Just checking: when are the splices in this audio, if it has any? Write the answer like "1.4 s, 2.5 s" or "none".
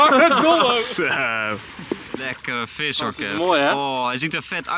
2.2 s